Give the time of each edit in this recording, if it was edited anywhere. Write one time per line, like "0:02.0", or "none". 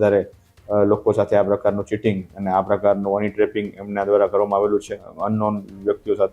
0:05.1